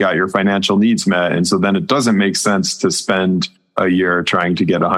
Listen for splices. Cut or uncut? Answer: cut